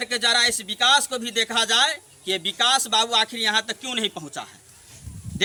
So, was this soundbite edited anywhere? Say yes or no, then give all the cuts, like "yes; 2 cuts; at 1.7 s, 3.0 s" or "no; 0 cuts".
no; 0 cuts